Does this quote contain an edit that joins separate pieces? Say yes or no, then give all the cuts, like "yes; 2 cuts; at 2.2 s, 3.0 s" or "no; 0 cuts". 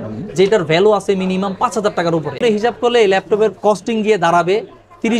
yes; 1 cut; at 2.4 s